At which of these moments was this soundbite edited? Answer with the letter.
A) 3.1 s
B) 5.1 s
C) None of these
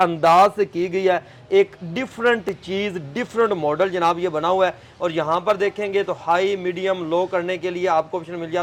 C